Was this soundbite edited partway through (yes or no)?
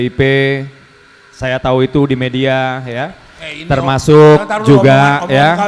no